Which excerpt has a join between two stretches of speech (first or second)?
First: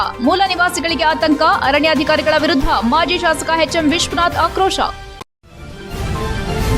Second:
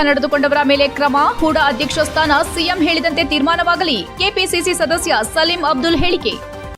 first